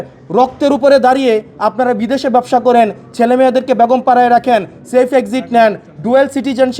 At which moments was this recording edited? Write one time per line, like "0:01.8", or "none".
none